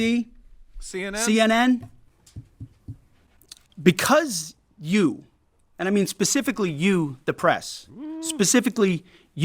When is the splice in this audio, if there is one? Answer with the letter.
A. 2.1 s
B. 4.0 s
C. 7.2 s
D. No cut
A